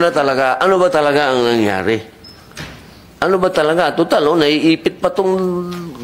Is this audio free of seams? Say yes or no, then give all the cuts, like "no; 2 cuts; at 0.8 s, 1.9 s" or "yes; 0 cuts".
yes; 0 cuts